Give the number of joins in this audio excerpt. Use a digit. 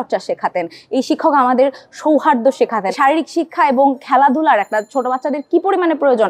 1